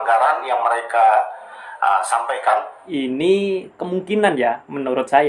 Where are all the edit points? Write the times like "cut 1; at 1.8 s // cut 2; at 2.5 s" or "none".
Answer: cut 1; at 2.8 s